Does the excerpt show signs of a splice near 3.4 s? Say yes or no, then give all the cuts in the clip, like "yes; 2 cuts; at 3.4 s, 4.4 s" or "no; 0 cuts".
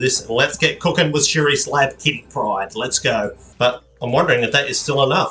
yes; 1 cut; at 3.4 s